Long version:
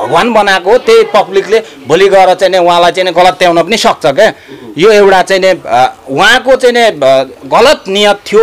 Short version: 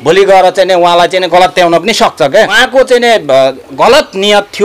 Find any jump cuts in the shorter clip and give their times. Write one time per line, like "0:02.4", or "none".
0:02.6